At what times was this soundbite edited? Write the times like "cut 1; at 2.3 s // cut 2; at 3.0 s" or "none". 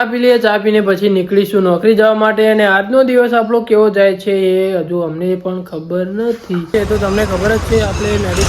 cut 1; at 6.7 s